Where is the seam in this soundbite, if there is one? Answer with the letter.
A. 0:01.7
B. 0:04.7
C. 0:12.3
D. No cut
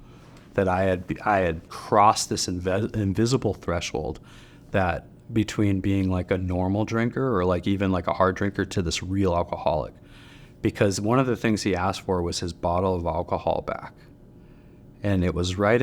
A